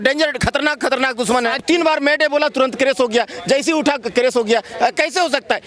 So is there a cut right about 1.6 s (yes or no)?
yes